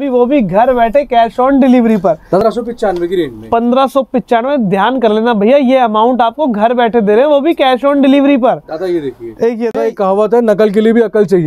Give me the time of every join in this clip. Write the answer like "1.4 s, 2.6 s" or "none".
2.4 s, 9.7 s